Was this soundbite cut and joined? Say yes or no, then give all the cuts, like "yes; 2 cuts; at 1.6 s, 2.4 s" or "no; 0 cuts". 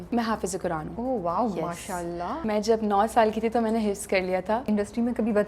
yes; 3 cuts; at 0.9 s, 2.4 s, 4.6 s